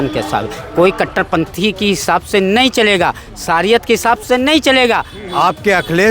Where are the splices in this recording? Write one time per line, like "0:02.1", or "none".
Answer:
0:05.2